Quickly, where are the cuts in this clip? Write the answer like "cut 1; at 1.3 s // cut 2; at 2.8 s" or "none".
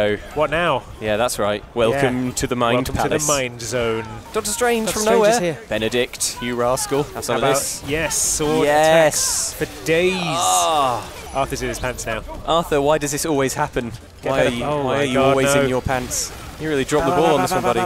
cut 1; at 1.3 s // cut 2; at 4.3 s // cut 3; at 5.6 s // cut 4; at 7.2 s // cut 5; at 11.2 s // cut 6; at 12.3 s // cut 7; at 14.0 s // cut 8; at 16.5 s